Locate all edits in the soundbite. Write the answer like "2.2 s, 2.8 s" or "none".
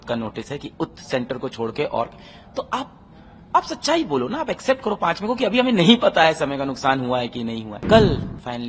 7.7 s